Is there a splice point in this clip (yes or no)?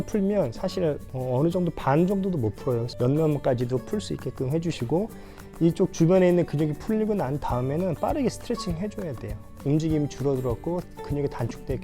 yes